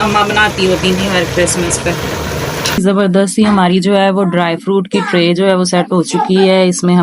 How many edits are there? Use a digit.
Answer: 1